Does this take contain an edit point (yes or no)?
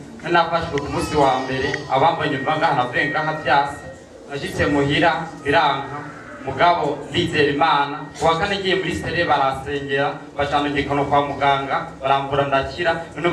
no